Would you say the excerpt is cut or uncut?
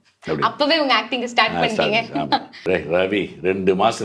cut